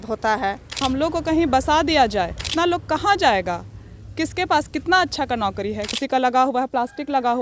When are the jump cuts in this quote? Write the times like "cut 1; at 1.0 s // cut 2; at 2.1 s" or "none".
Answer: cut 1; at 0.8 s // cut 2; at 2.4 s // cut 3; at 5.9 s